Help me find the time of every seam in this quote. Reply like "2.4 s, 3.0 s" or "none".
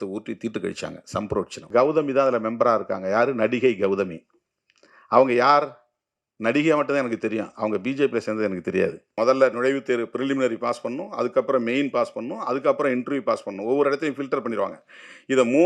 1.6 s, 9.0 s